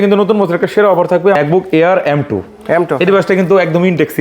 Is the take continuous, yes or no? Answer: no